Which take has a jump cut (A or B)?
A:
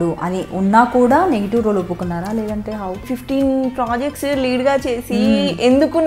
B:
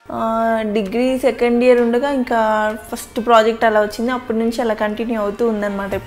A